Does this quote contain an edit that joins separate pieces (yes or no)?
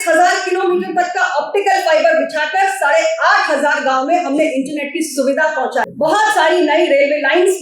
yes